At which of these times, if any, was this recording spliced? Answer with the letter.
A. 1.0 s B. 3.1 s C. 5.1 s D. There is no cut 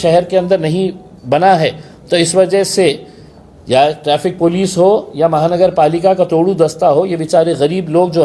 D